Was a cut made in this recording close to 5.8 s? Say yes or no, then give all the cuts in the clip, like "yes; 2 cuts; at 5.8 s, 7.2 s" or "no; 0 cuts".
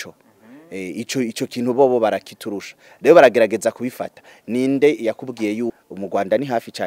yes; 1 cut; at 5.8 s